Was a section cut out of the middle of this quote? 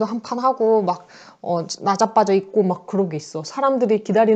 no; 0 cuts

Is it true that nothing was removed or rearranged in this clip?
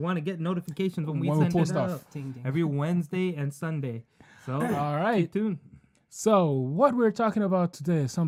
yes; 0 cuts

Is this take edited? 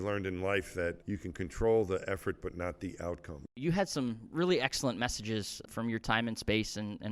yes; 3 cuts; at 1.0 s, 3.6 s, 5.7 s

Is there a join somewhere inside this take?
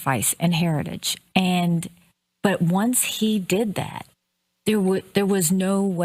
no; 0 cuts

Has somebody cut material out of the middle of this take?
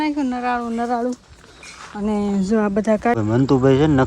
yes; 1 cut; at 3.2 s

